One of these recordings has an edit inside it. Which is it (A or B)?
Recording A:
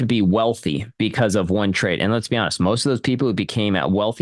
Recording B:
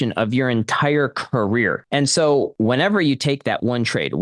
B